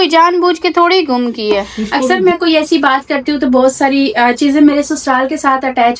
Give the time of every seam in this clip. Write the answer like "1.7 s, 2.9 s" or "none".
2.0 s